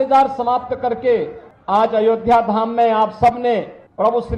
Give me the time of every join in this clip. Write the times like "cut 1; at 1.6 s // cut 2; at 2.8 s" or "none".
none